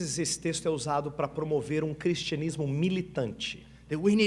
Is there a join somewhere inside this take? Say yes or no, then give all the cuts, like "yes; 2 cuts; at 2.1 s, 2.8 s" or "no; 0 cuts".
yes; 1 cut; at 2.4 s